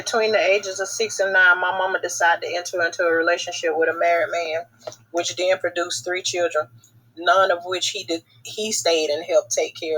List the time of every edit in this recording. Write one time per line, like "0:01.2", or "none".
0:01.5
0:05.7